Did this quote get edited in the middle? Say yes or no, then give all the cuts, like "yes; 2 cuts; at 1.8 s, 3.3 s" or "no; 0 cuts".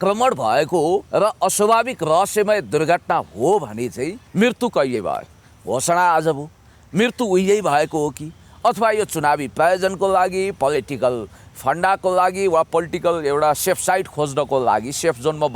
yes; 2 cuts; at 1.1 s, 4.2 s